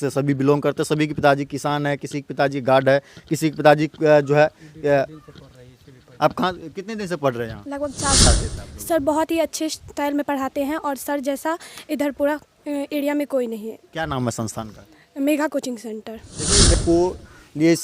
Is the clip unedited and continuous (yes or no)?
no